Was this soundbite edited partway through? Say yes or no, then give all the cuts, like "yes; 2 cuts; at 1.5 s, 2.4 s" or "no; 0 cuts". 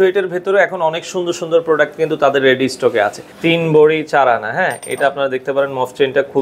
yes; 1 cut; at 3.3 s